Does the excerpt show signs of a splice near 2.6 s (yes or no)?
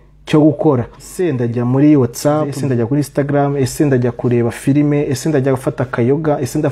yes